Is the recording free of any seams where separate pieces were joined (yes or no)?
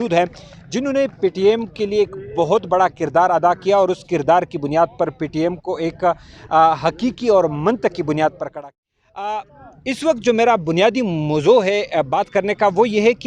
no